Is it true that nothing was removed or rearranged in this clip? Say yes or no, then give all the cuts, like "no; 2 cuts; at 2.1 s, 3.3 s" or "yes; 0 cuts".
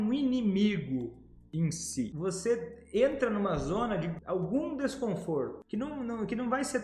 no; 3 cuts; at 2.1 s, 4.2 s, 5.6 s